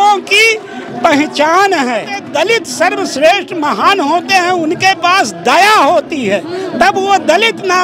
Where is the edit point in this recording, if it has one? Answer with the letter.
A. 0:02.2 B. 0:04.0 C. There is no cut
A